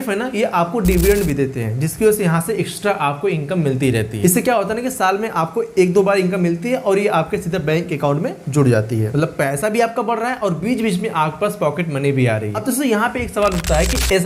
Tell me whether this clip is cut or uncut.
uncut